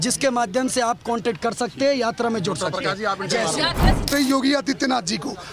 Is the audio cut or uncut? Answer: cut